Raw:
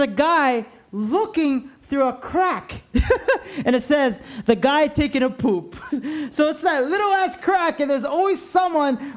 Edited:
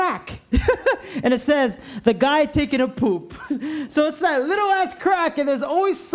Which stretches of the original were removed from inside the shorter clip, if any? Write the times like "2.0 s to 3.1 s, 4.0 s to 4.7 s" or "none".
none